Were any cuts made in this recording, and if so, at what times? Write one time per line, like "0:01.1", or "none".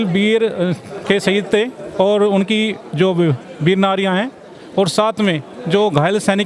none